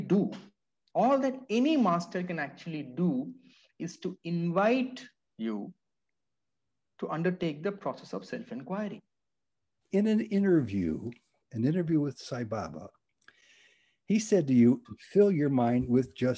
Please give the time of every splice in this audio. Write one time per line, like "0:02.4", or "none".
0:09.7
0:14.8